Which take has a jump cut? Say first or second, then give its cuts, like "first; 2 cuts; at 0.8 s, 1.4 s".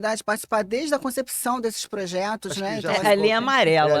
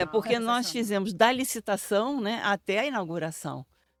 first; 1 cut; at 2.8 s